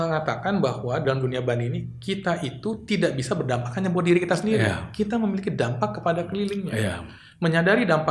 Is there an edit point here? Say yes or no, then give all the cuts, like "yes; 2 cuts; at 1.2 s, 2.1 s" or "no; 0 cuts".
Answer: no; 0 cuts